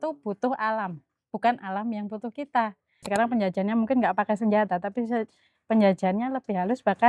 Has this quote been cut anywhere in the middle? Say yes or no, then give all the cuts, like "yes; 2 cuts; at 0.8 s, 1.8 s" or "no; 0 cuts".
yes; 1 cut; at 3.1 s